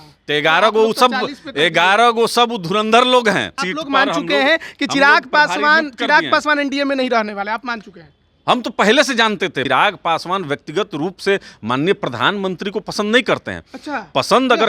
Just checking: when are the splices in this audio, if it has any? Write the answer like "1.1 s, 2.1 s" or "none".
3.6 s, 9.6 s